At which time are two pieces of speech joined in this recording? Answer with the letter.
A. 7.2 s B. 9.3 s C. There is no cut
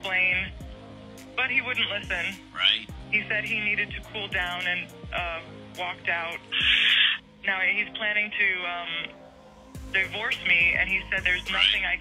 A